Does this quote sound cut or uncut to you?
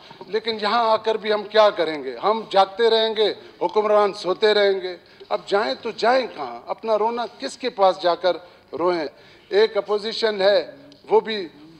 cut